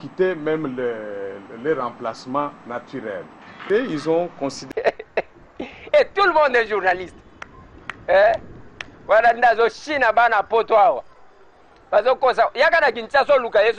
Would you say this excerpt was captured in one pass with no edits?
no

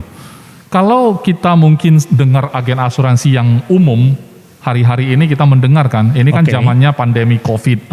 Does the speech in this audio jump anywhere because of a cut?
no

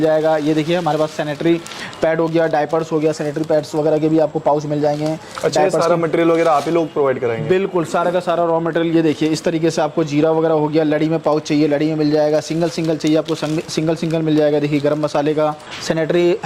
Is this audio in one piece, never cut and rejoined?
yes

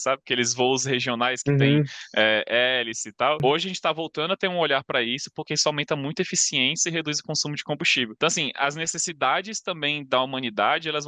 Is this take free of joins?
no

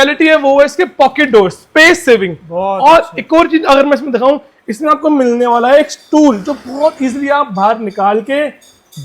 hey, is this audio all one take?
yes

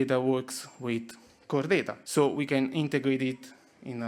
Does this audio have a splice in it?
yes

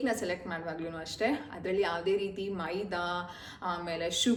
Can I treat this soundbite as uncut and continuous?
yes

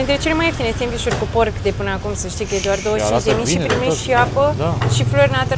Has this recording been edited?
no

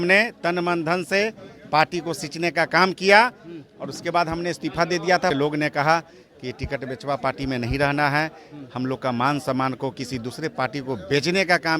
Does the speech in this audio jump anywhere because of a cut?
yes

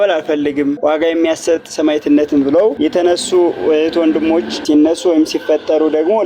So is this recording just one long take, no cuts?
no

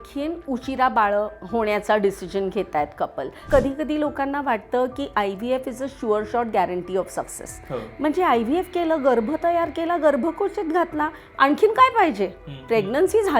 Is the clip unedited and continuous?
no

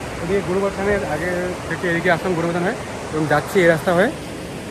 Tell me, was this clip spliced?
no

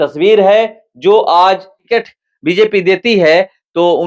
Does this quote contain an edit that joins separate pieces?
yes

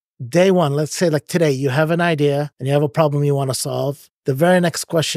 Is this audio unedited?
no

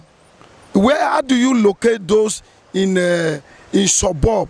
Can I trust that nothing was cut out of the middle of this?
yes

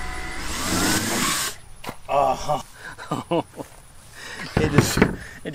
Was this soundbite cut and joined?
yes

